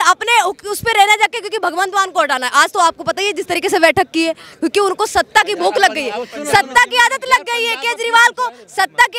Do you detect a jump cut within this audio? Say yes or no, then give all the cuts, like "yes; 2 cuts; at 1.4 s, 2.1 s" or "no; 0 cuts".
no; 0 cuts